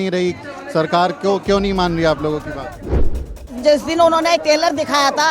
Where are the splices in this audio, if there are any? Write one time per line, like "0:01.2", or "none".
0:03.2